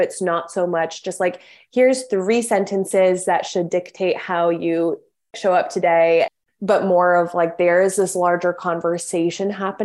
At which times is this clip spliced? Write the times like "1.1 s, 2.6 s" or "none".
5.3 s, 6.3 s